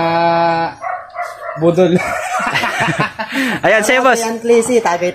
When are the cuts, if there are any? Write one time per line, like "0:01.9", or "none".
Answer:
none